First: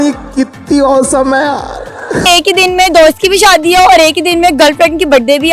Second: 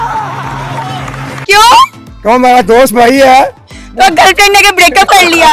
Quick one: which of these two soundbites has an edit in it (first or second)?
first